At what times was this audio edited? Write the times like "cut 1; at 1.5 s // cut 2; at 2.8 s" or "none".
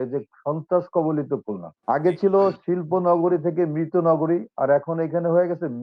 none